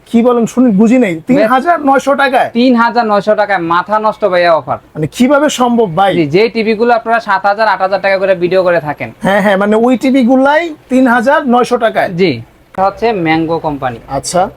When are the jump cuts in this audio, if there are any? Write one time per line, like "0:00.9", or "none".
0:12.7

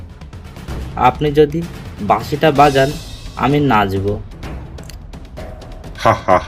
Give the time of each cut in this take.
none

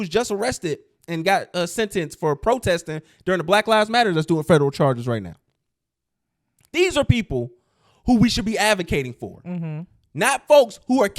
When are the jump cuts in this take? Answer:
none

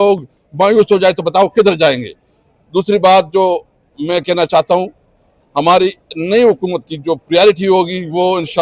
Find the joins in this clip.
none

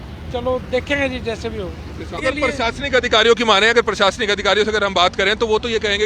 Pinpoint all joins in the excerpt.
0:02.2

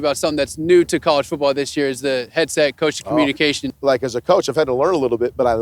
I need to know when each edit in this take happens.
0:03.7

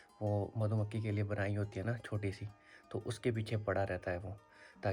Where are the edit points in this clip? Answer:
none

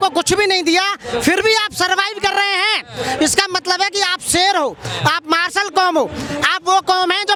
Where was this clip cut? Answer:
none

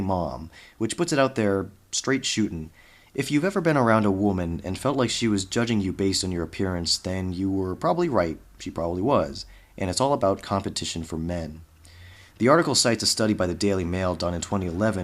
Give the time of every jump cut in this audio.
0:06.5

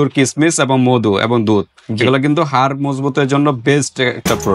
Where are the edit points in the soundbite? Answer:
none

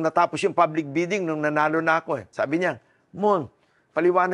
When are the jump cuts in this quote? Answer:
0:02.3

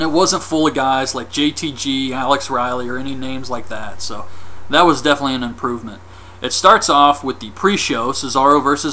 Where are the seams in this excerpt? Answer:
none

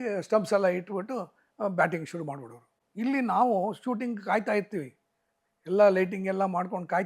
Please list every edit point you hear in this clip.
none

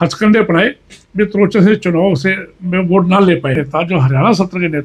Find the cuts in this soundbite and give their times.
0:03.6

